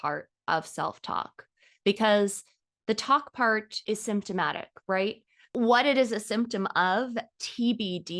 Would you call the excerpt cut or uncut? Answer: cut